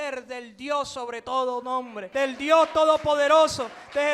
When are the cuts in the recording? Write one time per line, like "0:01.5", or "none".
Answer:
0:02.0